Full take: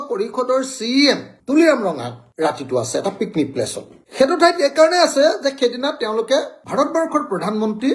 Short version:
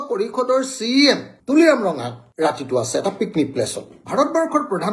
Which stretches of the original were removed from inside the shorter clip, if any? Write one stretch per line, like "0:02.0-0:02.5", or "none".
0:04.0-0:06.6